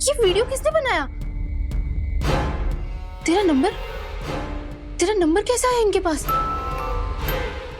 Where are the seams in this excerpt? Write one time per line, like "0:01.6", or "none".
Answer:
none